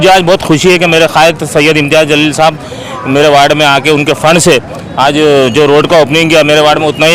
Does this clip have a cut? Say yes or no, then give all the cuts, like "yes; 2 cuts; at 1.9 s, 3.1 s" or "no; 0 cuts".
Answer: no; 0 cuts